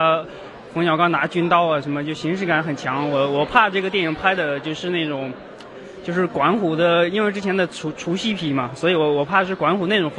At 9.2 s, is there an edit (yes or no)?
yes